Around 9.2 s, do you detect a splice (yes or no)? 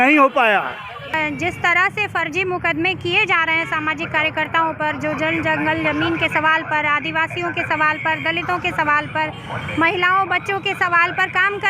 no